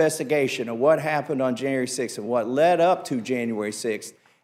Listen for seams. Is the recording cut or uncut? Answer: uncut